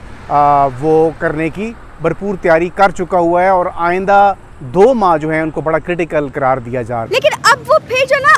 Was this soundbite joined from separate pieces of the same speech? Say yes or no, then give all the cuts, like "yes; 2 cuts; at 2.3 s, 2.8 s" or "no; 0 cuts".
yes; 1 cut; at 7.0 s